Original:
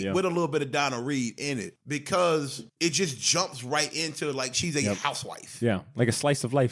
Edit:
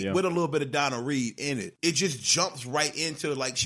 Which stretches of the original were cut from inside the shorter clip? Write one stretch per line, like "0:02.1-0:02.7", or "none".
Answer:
0:01.7-0:02.7